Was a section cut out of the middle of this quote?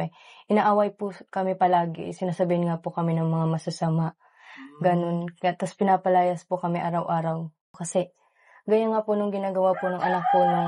yes; 1 cut; at 7.8 s

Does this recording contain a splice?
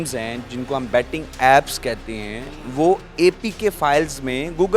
no; 0 cuts

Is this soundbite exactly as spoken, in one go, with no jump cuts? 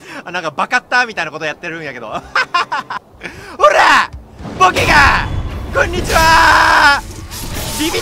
no; 1 cut; at 3.1 s

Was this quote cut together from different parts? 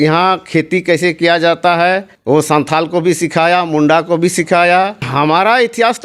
yes; 2 cuts; at 2.1 s, 5.0 s

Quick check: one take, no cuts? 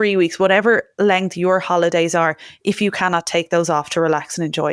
yes; 0 cuts

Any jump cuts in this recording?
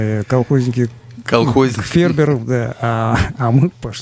no; 0 cuts

